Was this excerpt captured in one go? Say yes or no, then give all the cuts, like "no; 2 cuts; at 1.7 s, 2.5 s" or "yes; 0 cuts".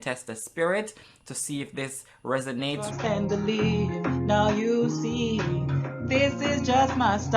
no; 1 cut; at 2.9 s